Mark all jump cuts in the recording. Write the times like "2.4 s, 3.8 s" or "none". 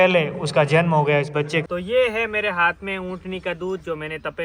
1.6 s